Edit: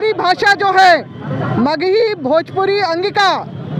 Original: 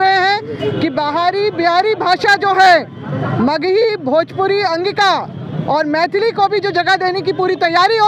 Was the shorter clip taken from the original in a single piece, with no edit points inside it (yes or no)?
yes